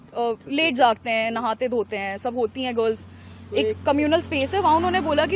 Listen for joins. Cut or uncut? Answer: uncut